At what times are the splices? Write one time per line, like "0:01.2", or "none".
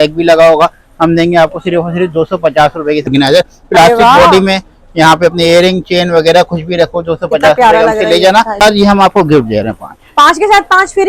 0:03.1
0:08.6